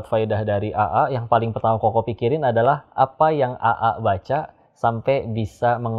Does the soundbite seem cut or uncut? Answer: uncut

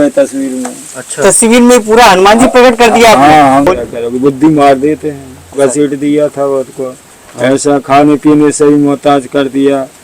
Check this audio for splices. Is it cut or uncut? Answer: cut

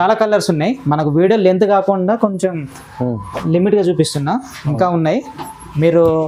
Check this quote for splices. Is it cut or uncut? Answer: uncut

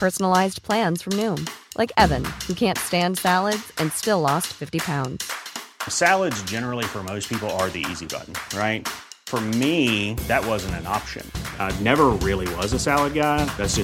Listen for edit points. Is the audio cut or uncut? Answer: uncut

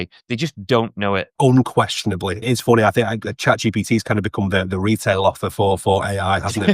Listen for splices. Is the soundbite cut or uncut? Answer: cut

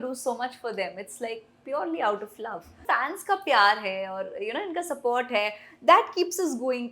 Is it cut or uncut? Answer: cut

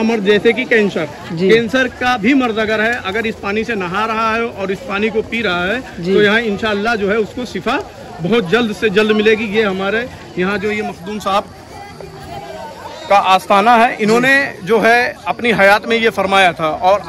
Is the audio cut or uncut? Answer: uncut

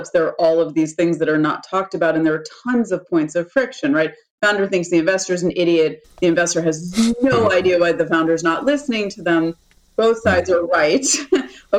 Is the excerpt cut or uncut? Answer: uncut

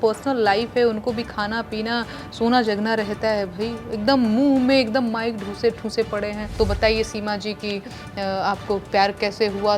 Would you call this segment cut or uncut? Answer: cut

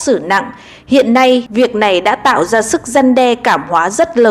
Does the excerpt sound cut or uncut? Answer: cut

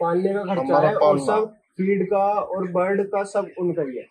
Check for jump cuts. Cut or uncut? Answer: uncut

